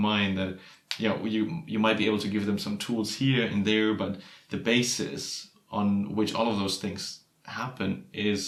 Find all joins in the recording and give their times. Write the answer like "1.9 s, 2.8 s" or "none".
none

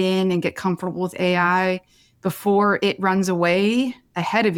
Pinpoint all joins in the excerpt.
none

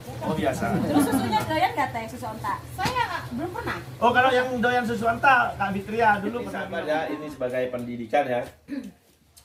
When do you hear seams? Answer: 6.7 s

